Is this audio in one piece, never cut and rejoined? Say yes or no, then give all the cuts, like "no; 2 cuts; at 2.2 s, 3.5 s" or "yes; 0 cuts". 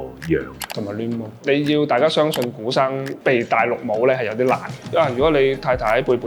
no; 3 cuts; at 1.4 s, 3.2 s, 4.9 s